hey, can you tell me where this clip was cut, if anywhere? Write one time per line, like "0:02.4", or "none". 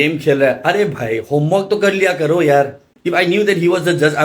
0:02.9